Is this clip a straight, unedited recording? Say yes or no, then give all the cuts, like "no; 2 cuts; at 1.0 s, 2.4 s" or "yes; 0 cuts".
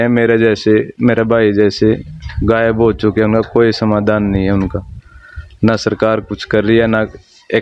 yes; 0 cuts